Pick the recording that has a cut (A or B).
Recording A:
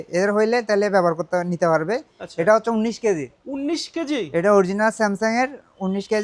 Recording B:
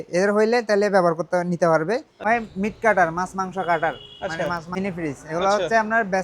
B